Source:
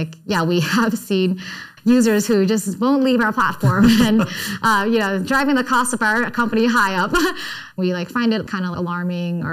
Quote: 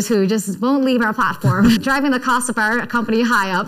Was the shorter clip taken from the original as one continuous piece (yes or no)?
no